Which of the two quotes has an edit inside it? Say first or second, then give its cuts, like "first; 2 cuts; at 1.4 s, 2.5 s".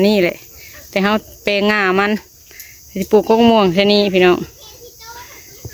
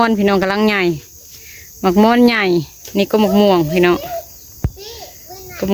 second; 1 cut; at 2.8 s